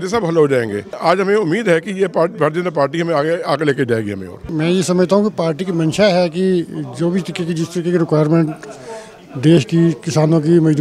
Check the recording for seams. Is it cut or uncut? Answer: cut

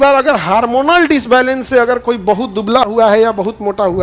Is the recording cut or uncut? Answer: uncut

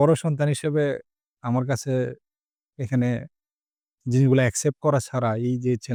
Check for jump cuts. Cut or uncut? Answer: uncut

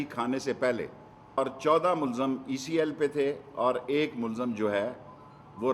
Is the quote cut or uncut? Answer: cut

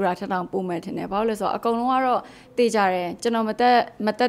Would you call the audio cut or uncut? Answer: uncut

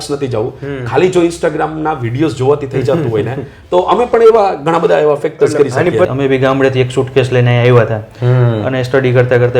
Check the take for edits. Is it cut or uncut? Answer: cut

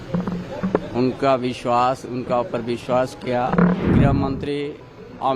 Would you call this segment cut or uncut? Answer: cut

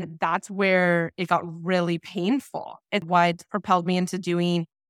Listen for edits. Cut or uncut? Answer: cut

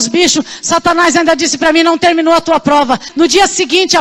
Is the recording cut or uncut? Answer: cut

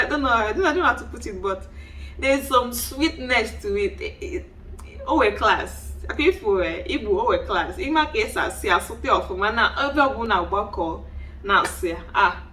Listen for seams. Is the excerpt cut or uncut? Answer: cut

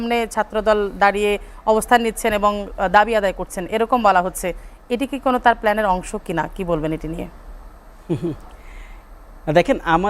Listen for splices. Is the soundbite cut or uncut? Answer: uncut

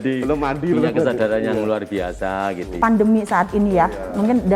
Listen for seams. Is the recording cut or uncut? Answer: cut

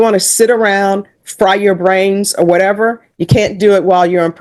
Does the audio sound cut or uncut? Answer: uncut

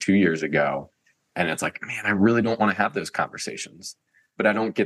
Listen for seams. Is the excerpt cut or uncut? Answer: uncut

